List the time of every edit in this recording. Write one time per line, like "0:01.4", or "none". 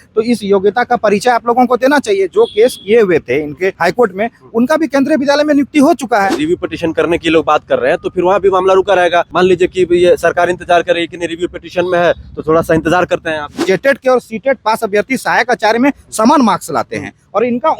0:03.8
0:06.4
0:09.3
0:13.5